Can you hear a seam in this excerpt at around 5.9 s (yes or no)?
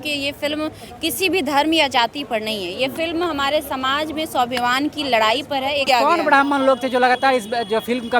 yes